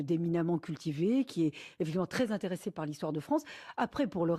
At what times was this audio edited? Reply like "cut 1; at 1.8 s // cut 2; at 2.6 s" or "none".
cut 1; at 1.9 s